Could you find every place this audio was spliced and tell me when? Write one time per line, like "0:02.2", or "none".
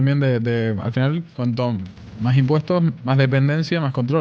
0:01.3
0:03.0